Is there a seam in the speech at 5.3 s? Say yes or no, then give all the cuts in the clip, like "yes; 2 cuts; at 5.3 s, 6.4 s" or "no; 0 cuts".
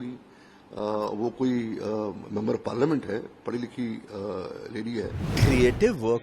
yes; 1 cut; at 5.3 s